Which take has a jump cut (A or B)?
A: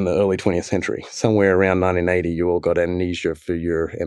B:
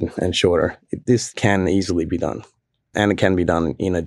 B